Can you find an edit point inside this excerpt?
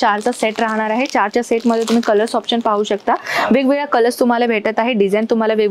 no; 0 cuts

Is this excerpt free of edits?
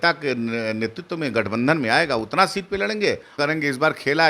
no; 1 cut; at 3.4 s

